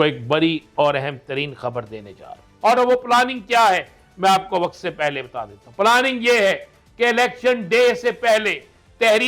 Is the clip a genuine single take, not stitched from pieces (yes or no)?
no